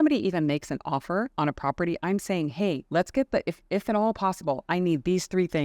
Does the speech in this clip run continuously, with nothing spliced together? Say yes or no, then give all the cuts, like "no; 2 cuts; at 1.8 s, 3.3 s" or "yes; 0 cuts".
no; 2 cuts; at 1.3 s, 2.8 s